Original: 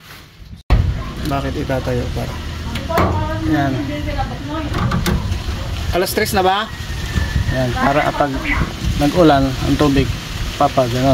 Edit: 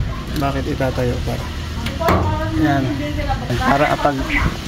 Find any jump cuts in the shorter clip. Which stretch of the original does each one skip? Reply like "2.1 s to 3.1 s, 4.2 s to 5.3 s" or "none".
4.4 s to 7.7 s

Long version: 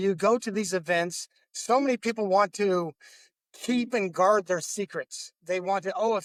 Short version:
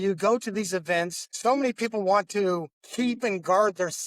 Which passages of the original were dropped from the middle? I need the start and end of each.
1.2 s to 1.5 s, 3.0 s to 3.5 s

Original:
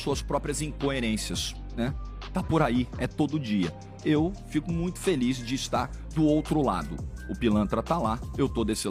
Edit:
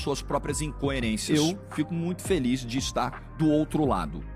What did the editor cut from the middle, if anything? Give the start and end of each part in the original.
1.2 s to 4.0 s

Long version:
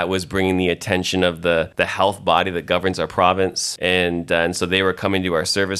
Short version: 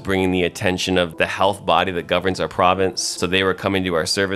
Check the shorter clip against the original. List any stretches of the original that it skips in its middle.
1.4 s to 1.7 s, 3.7 s to 4.5 s

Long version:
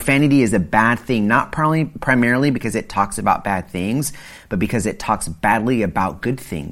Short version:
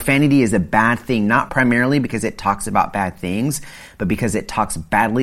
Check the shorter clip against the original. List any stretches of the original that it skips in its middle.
1.5 s to 2.0 s

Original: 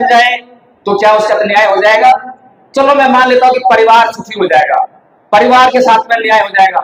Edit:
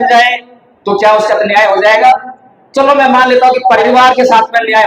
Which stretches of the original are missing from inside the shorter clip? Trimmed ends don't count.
3.8 s to 5.4 s

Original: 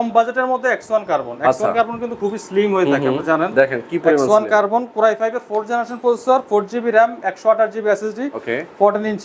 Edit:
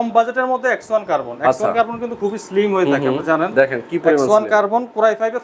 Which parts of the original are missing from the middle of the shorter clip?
none

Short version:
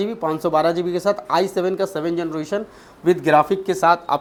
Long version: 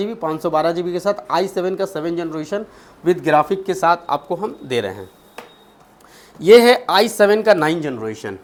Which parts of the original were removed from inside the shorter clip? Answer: none

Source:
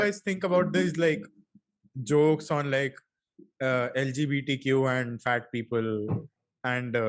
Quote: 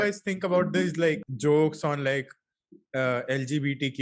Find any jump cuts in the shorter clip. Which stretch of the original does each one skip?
1.3 s to 1.9 s

